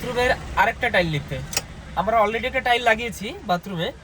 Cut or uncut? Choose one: uncut